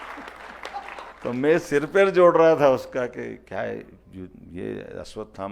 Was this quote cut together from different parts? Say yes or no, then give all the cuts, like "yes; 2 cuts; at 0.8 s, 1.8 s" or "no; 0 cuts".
yes; 1 cut; at 1.1 s